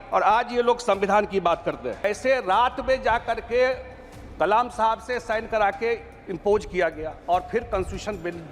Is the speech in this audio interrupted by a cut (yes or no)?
yes